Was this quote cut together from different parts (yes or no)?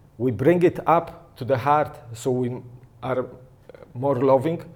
no